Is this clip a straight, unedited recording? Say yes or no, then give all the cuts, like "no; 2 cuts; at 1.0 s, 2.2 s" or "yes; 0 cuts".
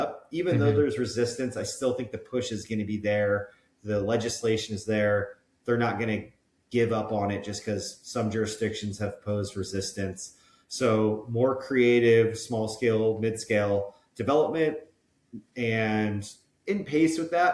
yes; 0 cuts